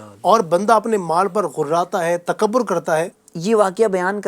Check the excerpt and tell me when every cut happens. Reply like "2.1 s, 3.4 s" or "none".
3.2 s

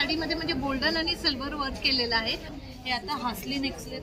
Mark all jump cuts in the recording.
2.5 s

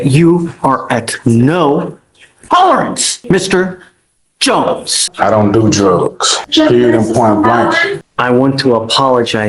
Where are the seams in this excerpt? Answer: 3.1 s, 5.1 s, 6.3 s, 8.0 s

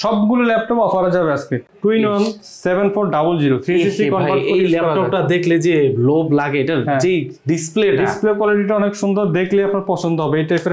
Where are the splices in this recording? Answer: 1.6 s

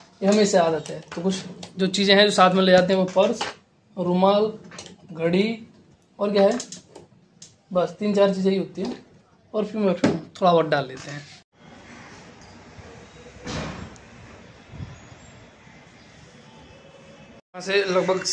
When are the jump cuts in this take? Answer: none

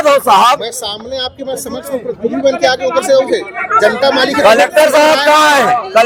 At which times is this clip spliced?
none

